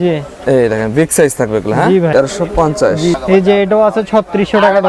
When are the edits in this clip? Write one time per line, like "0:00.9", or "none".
0:02.1
0:03.2